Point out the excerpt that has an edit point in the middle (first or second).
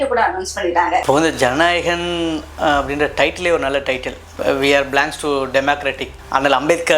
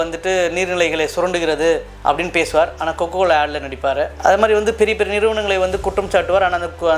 first